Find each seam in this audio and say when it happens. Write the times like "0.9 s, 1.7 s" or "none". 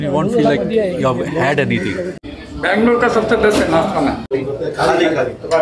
none

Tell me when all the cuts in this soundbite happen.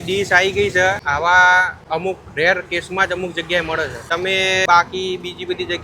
1.0 s, 1.8 s, 4.2 s

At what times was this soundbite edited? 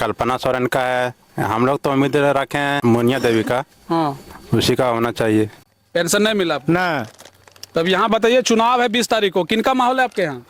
5.6 s

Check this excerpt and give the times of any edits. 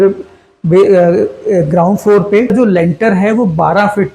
2.5 s

